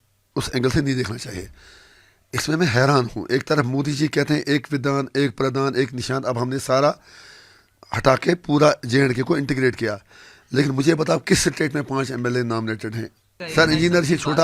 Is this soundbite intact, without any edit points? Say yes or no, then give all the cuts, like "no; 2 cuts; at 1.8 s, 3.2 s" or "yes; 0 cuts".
no; 1 cut; at 13.4 s